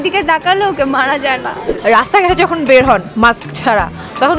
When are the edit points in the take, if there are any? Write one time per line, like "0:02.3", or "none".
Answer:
0:01.6